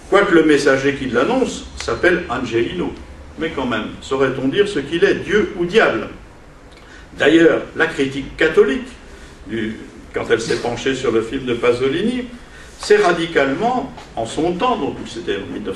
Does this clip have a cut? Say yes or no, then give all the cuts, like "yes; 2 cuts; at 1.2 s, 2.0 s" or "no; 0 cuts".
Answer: no; 0 cuts